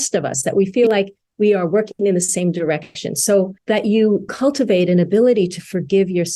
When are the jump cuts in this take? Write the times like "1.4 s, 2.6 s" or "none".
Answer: 3.6 s, 4.3 s